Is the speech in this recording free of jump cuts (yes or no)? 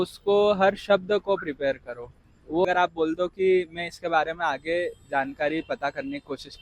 no